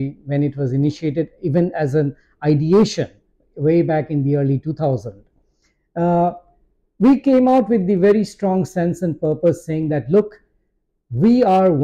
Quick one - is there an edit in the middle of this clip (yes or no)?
no